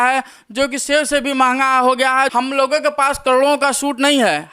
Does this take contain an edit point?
yes; 1 cut; at 2.3 s

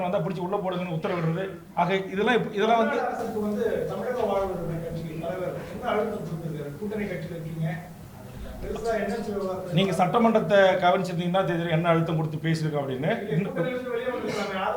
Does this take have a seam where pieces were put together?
no; 0 cuts

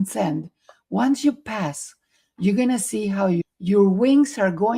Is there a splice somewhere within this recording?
yes; 1 cut; at 3.4 s

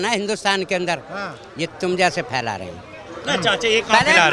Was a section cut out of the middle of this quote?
no; 0 cuts

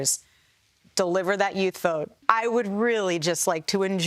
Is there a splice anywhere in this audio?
yes; 1 cut; at 2.1 s

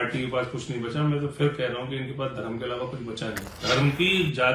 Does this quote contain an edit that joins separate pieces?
yes; 1 cut; at 3.6 s

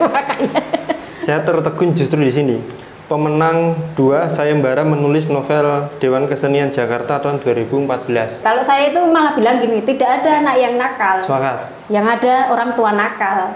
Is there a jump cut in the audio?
yes; 2 cuts; at 1.1 s, 8.4 s

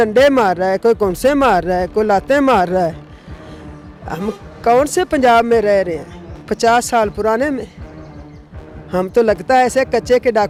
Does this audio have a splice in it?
no; 0 cuts

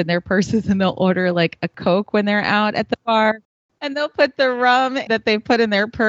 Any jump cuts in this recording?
yes; 3 cuts; at 1.7 s, 3.5 s, 5.0 s

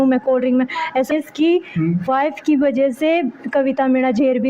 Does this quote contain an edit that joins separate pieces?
yes; 1 cut; at 1.1 s

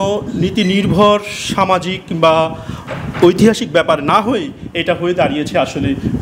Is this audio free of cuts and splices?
yes; 0 cuts

